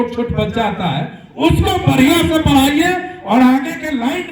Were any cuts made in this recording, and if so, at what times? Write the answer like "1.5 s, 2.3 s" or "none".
none